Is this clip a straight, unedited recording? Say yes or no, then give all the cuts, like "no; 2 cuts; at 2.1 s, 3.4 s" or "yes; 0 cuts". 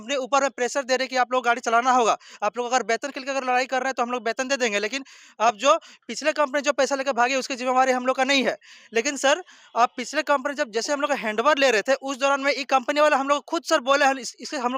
yes; 0 cuts